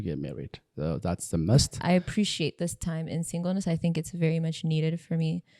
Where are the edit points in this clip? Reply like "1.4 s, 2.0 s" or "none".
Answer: 1.7 s